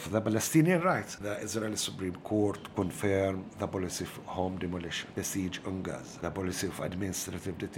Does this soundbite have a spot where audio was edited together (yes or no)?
yes